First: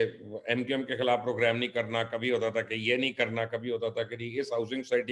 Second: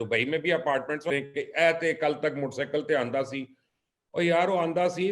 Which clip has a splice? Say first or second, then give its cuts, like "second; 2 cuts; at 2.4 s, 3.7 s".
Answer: second; 1 cut; at 1.1 s